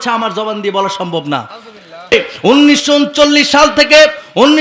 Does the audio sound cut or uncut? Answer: cut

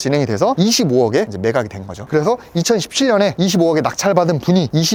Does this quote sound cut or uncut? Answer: uncut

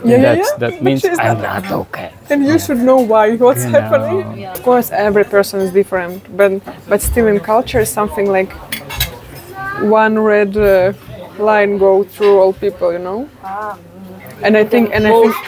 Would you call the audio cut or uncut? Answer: cut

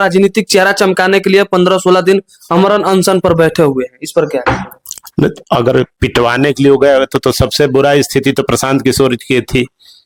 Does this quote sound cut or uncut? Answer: uncut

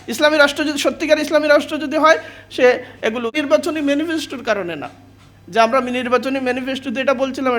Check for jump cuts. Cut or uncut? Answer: cut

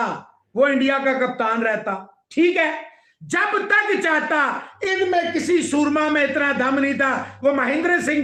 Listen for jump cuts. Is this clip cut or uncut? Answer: uncut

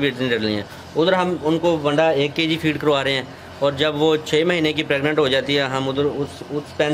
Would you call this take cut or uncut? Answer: uncut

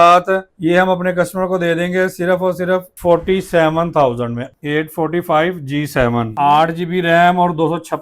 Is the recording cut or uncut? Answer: cut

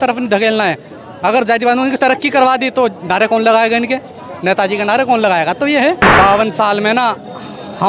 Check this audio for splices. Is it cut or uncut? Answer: cut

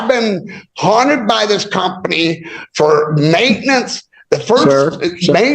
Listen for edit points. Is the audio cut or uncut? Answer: uncut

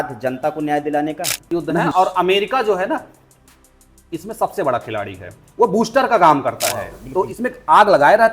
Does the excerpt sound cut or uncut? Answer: cut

